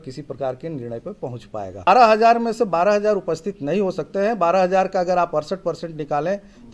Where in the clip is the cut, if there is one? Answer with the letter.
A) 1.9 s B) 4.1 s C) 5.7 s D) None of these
A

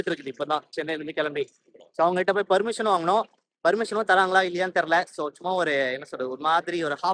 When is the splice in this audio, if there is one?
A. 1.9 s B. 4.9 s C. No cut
C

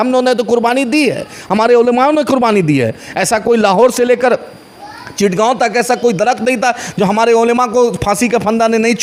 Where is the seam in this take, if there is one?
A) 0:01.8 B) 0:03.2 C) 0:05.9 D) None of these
D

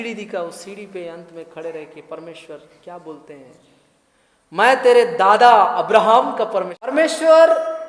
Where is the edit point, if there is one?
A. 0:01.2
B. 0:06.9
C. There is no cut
B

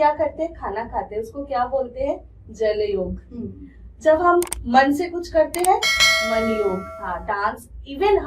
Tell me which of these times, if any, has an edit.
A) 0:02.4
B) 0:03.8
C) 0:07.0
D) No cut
C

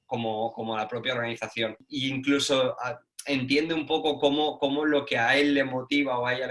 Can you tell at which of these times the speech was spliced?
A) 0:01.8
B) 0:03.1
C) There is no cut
A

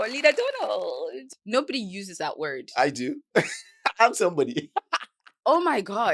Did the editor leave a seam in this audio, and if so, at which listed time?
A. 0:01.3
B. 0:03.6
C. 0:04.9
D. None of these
A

